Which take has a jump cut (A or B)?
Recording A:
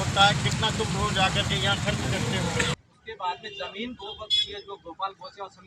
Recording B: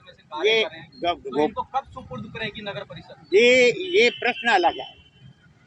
A